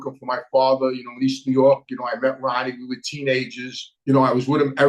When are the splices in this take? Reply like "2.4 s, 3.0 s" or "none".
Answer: 3.8 s

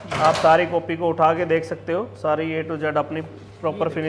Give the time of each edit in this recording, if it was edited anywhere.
none

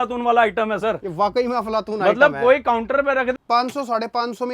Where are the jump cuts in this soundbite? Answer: 3.3 s

